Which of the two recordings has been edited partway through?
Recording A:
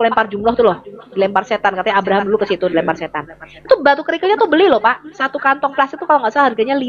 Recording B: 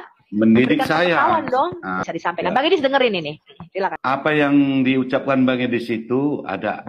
B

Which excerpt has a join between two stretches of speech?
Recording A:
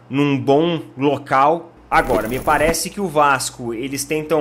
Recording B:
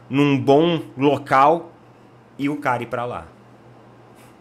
A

